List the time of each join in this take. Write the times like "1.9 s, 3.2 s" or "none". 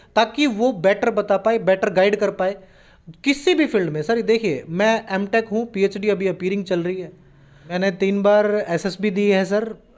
7.7 s